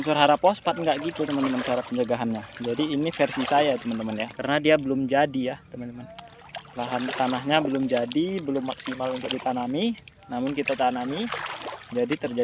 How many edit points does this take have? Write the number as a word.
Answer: one